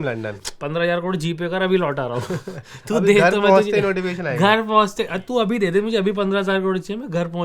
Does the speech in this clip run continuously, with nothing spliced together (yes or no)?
yes